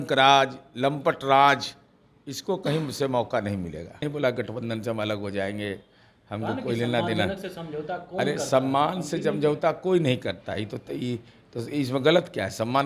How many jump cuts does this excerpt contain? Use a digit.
1